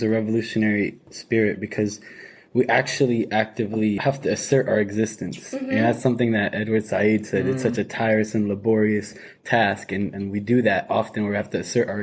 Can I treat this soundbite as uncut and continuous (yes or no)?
no